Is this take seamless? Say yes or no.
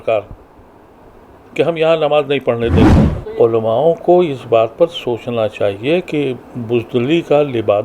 no